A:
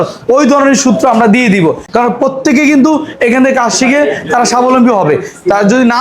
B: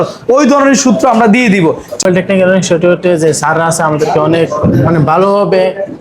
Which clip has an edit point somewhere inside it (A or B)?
B